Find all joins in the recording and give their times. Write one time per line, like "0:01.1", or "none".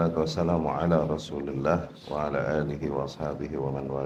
none